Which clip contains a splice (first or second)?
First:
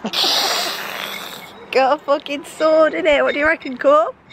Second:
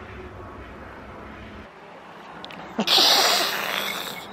second